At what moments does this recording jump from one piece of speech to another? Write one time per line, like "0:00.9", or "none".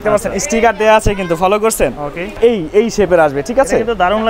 0:02.3